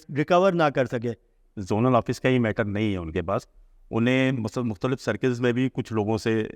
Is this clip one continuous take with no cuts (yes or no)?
no